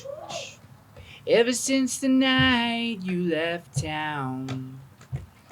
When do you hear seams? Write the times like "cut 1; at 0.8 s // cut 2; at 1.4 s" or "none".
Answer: none